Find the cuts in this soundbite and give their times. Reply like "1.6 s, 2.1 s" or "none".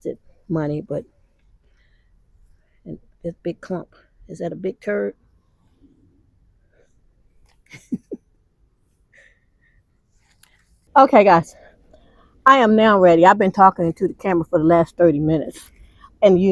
10.9 s